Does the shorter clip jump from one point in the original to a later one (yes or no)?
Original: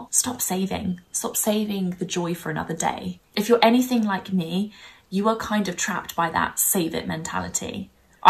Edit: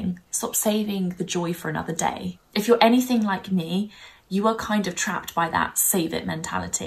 no